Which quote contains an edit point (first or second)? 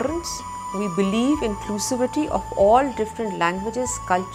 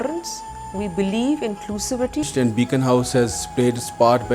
second